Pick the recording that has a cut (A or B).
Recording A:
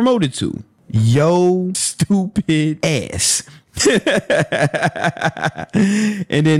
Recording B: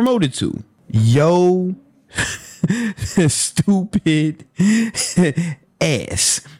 A